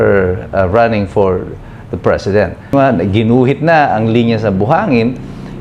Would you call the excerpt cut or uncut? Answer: cut